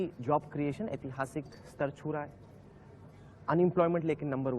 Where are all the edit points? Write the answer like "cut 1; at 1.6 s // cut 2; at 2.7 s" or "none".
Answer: none